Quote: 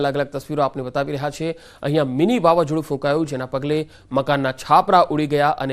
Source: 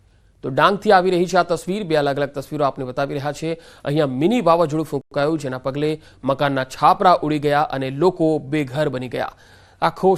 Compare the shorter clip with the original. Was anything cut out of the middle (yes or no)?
yes